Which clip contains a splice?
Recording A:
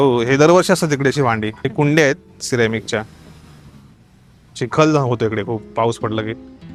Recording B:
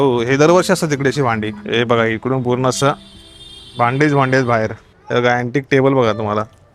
B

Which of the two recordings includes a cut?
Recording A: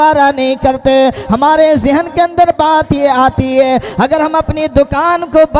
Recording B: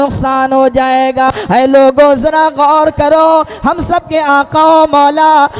B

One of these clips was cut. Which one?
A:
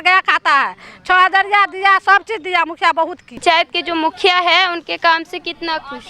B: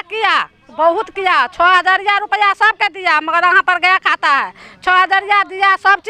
A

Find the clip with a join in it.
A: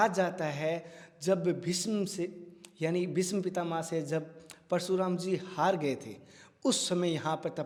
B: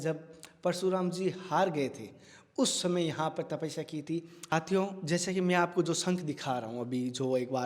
B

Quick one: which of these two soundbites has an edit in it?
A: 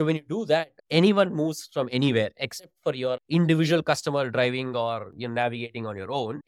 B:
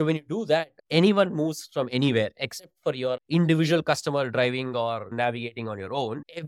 B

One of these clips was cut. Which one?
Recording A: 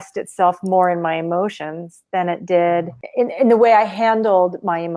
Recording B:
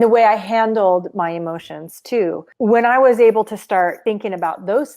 B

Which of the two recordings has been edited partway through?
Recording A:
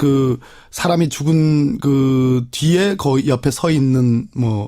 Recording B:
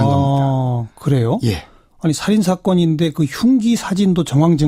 A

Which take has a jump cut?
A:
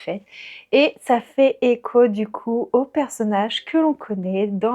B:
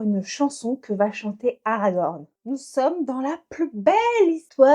B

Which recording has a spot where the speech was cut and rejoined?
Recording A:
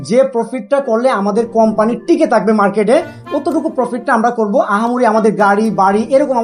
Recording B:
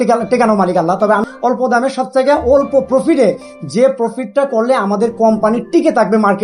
B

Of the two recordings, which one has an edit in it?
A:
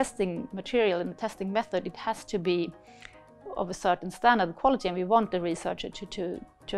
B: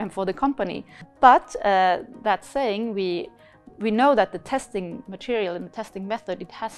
B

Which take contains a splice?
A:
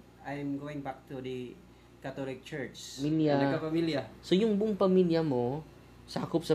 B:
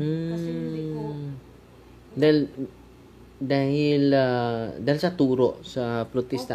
A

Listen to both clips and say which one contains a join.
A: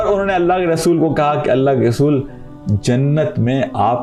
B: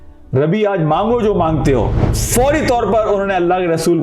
B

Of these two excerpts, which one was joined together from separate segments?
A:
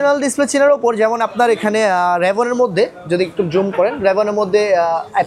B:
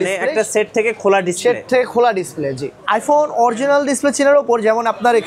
B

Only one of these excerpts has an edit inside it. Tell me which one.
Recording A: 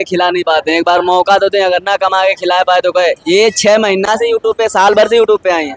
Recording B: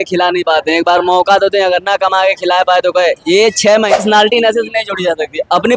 B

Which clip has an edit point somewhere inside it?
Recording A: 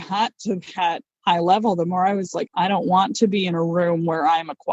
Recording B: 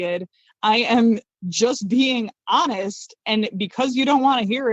A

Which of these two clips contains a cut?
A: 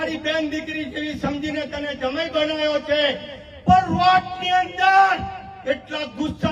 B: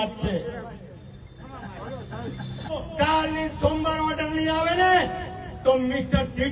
B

